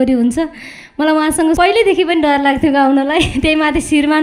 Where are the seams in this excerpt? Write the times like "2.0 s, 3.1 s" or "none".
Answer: 1.6 s